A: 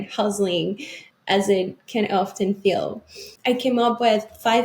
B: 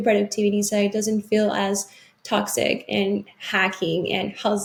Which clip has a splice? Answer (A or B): A